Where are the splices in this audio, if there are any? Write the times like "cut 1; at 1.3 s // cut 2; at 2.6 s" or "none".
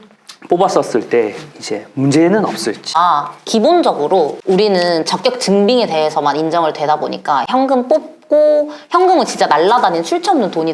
none